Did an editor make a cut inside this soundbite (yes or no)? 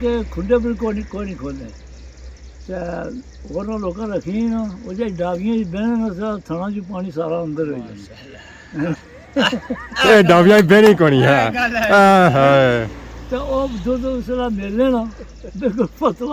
no